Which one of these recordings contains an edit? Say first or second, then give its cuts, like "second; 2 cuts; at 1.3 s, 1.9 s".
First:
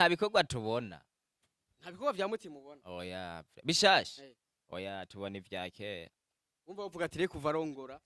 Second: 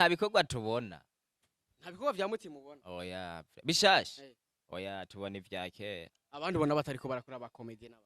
second; 1 cut; at 6.2 s